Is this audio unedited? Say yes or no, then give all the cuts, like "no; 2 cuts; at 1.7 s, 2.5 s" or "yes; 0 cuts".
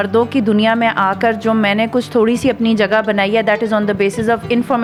yes; 0 cuts